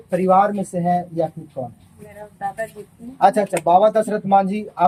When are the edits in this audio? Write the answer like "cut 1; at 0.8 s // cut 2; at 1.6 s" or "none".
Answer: none